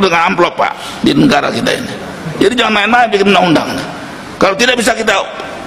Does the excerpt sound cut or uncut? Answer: uncut